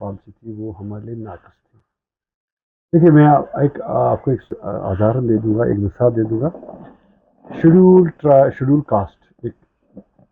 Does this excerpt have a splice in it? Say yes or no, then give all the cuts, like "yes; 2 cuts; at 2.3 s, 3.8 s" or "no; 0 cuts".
no; 0 cuts